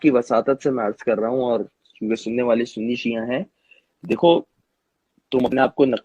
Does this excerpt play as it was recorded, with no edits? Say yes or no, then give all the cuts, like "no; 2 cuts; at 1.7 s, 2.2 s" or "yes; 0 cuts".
yes; 0 cuts